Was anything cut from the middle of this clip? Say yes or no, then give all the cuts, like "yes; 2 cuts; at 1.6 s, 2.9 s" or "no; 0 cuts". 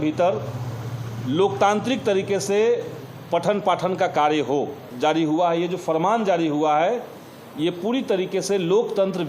yes; 1 cut; at 5.0 s